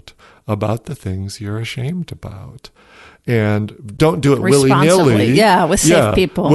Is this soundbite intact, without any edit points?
no; 1 cut; at 3.9 s

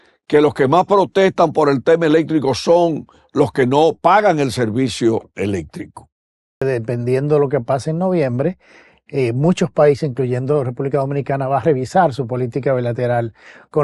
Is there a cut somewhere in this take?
yes; 1 cut; at 6.6 s

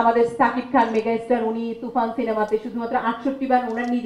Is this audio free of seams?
yes; 0 cuts

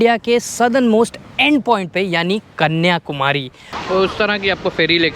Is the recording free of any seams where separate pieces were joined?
no; 1 cut; at 3.8 s

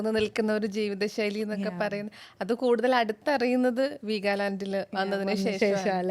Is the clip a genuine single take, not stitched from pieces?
yes; 0 cuts

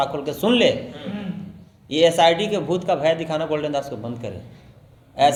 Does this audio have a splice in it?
no; 0 cuts

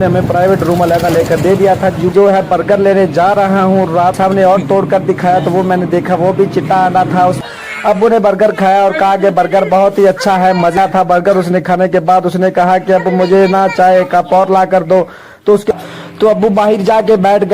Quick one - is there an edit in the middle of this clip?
yes; 5 cuts; at 2.1 s, 4.2 s, 7.4 s, 10.8 s, 15.7 s

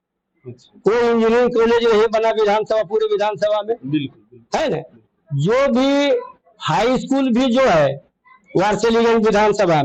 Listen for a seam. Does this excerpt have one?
no; 0 cuts

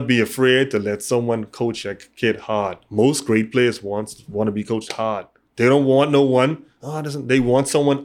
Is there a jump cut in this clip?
no; 0 cuts

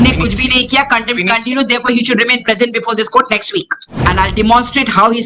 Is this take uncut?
no; 1 cut; at 3.8 s

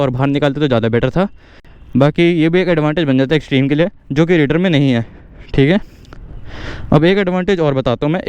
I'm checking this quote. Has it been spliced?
no; 0 cuts

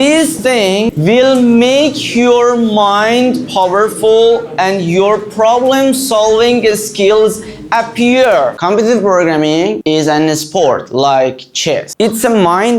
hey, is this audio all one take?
no; 2 cuts; at 0.9 s, 8.6 s

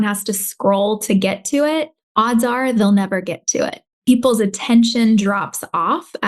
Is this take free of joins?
no; 1 cut; at 3.8 s

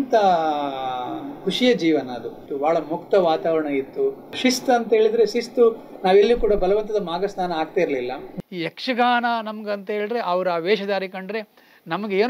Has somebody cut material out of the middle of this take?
yes; 3 cuts; at 2.5 s, 4.4 s, 8.4 s

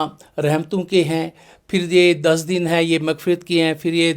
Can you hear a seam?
no; 0 cuts

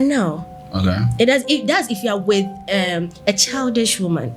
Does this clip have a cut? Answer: no; 0 cuts

